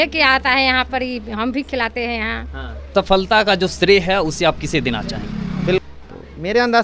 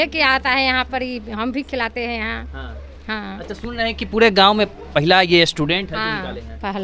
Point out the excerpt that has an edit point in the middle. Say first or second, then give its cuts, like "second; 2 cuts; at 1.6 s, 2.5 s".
first; 2 cuts; at 2.9 s, 5.8 s